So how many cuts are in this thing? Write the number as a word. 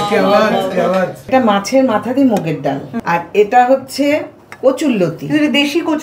two